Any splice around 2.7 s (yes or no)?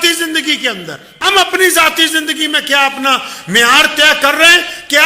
no